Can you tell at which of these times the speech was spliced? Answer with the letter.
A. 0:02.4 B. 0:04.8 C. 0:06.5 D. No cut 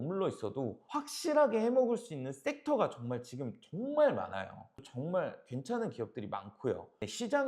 B